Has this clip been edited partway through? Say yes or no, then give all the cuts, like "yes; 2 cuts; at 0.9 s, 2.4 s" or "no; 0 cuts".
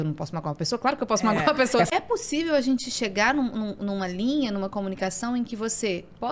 yes; 1 cut; at 1.9 s